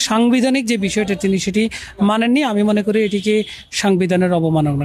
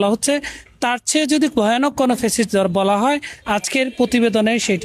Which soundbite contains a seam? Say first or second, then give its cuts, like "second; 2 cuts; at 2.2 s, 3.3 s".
second; 1 cut; at 3.3 s